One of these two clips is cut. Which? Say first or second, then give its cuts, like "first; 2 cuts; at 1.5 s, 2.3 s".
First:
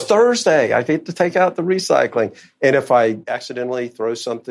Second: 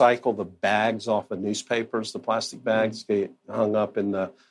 first; 1 cut; at 3.3 s